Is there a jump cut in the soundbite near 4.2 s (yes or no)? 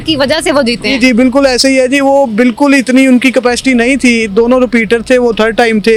no